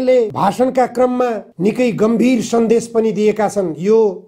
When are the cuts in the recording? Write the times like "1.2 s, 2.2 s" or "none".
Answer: 1.5 s

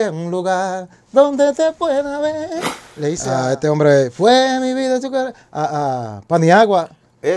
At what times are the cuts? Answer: none

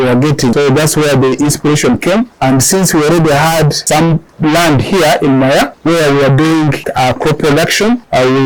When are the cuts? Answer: none

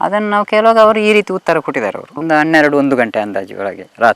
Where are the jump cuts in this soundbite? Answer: 2.1 s

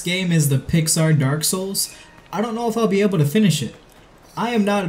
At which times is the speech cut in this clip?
none

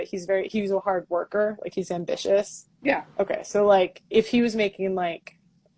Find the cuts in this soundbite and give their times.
1.8 s, 2.6 s

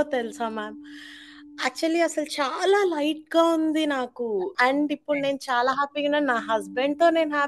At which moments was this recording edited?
4.5 s

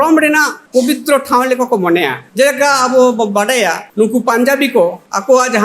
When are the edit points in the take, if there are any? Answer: none

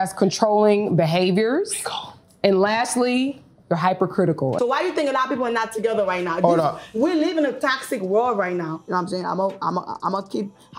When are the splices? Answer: 4.6 s, 8.8 s

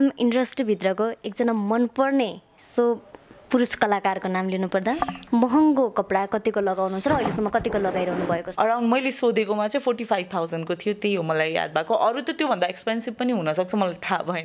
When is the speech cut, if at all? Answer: 5.2 s, 8.5 s

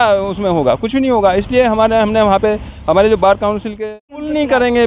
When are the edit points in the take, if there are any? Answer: 3.9 s

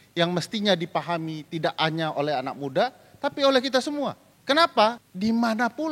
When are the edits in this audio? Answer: 4.3 s, 5.1 s

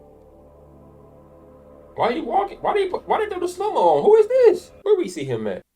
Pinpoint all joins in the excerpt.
4.7 s

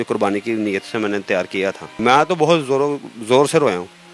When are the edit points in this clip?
1.9 s

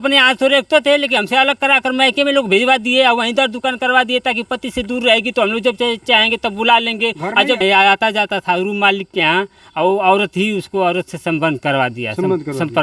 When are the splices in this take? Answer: 7.6 s

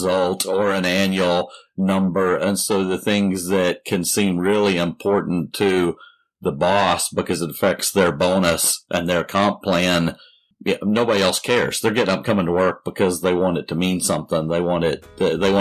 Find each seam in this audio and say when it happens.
10.5 s

